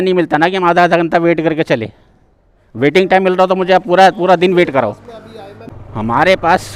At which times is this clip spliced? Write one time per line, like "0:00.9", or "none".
0:05.7